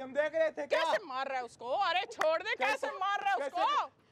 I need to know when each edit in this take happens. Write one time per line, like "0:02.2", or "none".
none